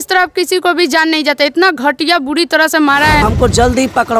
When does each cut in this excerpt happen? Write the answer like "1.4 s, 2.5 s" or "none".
3.2 s